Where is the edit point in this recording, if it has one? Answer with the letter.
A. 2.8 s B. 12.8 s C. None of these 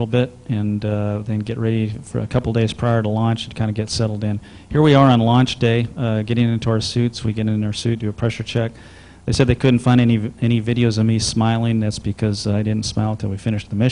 A